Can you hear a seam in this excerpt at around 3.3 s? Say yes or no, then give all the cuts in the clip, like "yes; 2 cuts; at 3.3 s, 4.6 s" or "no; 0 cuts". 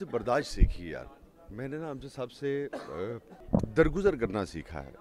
yes; 1 cut; at 3.3 s